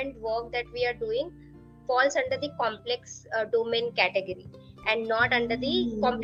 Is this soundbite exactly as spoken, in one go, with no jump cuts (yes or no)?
yes